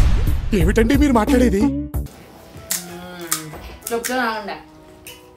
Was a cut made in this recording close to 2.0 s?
yes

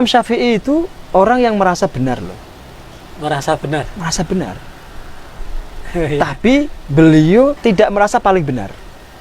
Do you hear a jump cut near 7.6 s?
yes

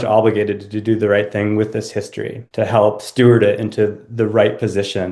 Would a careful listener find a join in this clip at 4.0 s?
no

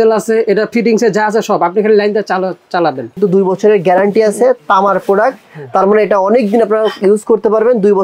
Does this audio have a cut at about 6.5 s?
no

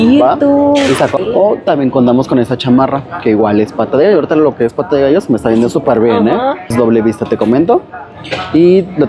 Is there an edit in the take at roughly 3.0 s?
no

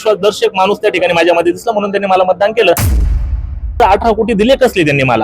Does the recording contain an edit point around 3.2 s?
yes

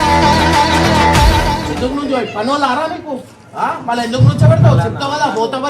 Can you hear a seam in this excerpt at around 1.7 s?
yes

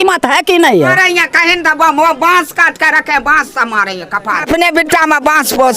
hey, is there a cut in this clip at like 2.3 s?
no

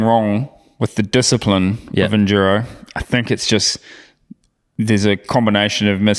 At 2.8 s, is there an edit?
no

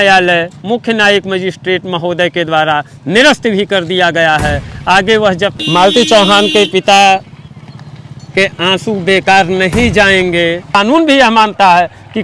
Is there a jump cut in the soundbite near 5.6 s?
yes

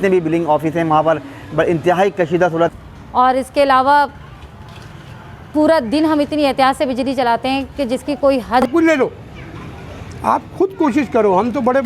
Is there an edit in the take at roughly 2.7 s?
yes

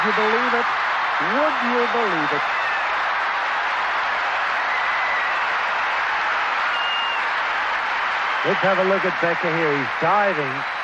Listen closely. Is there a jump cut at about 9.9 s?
yes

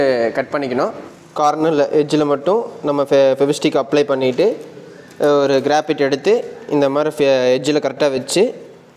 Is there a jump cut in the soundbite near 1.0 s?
yes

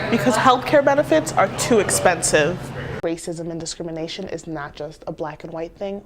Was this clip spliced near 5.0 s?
no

